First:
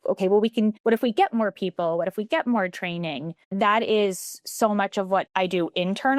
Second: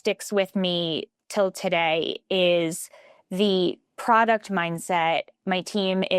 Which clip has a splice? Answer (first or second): first